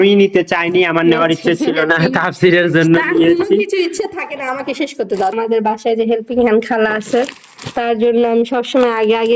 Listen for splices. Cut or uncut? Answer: cut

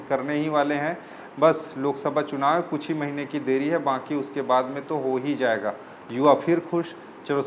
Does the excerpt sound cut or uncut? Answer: uncut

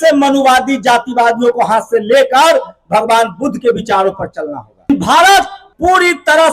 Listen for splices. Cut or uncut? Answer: cut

